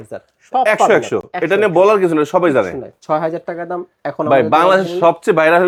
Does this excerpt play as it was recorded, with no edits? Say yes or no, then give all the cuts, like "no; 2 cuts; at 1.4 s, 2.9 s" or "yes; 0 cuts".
yes; 0 cuts